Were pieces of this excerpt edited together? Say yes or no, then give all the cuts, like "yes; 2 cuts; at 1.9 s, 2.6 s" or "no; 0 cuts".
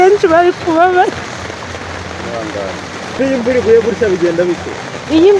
yes; 1 cut; at 3.1 s